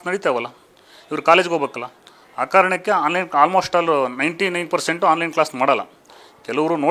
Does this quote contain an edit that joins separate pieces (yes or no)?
no